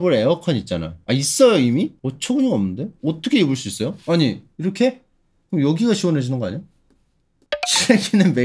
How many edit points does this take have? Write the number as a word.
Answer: two